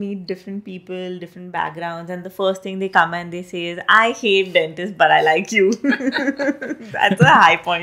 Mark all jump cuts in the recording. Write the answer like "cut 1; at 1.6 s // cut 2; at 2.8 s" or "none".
none